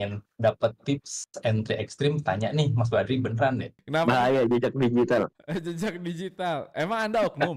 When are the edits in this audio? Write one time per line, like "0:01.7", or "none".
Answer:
0:03.7